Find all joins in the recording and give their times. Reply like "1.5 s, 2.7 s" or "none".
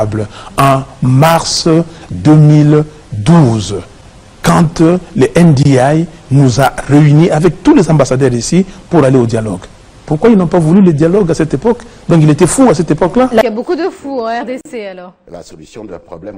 13.4 s